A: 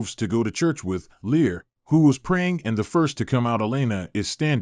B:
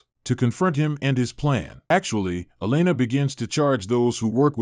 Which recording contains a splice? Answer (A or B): B